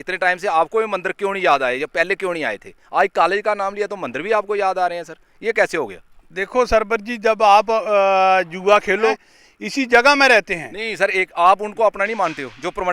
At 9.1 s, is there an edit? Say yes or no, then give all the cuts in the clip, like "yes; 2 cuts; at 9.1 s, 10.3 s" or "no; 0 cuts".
yes; 1 cut; at 9.1 s